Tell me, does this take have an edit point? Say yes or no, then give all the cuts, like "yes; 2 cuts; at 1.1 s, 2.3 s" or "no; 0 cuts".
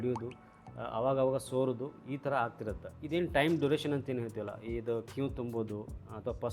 no; 0 cuts